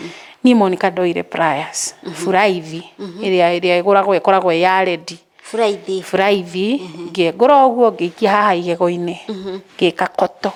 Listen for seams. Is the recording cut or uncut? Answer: uncut